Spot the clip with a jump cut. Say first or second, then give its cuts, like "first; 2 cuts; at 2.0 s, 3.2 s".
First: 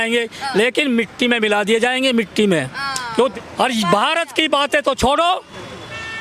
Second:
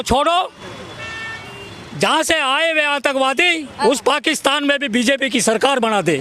first; 1 cut; at 3.3 s